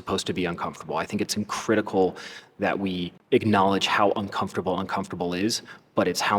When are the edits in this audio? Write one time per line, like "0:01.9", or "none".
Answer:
0:03.2